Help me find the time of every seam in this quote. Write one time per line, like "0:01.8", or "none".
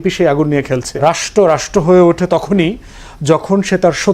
0:01.0